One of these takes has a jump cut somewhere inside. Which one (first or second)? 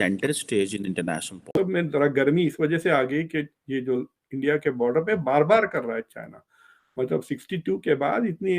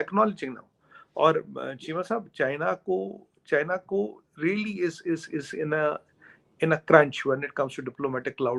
first